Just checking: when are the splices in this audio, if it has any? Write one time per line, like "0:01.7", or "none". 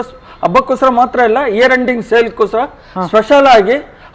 none